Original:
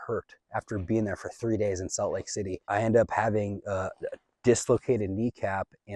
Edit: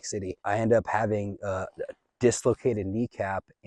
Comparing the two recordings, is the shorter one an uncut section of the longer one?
yes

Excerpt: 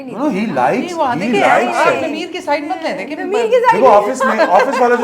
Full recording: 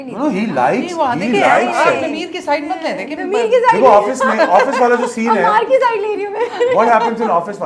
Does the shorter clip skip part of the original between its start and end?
no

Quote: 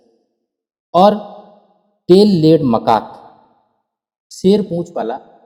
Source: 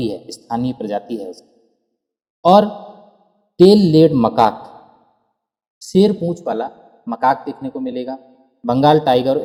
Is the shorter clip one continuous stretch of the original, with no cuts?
yes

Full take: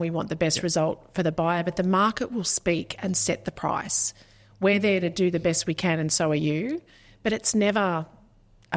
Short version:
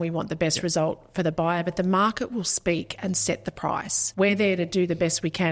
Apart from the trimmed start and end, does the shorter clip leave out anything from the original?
yes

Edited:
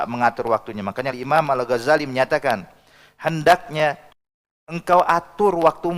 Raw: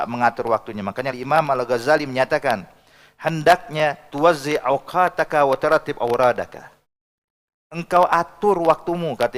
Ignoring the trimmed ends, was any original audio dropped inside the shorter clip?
yes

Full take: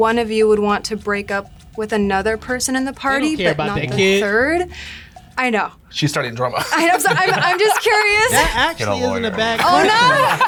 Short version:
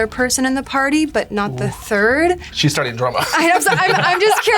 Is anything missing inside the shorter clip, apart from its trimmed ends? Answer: yes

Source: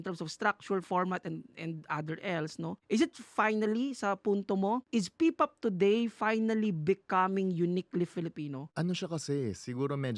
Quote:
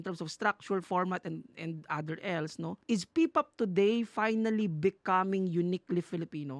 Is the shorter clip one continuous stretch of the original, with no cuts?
no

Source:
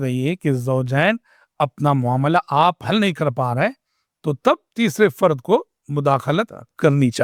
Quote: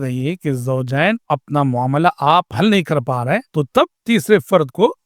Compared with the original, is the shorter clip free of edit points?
no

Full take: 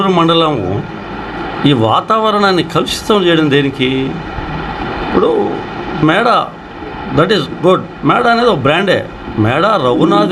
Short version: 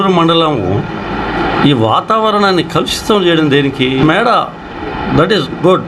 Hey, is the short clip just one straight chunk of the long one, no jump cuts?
no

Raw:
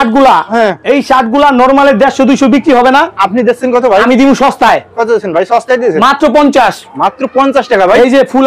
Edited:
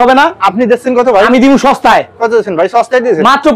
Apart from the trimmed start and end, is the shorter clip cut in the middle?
no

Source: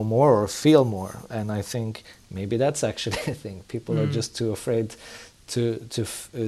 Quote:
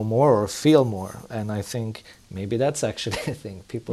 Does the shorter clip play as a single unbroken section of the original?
yes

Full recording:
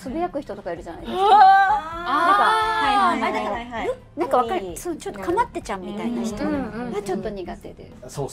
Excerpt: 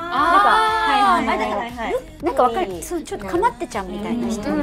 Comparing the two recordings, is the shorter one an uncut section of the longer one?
yes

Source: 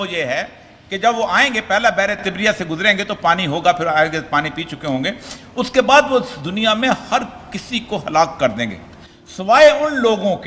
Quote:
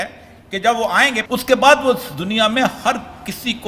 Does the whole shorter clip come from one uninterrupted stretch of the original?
no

